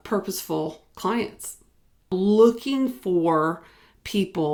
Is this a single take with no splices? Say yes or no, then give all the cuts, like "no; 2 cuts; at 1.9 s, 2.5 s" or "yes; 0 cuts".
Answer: yes; 0 cuts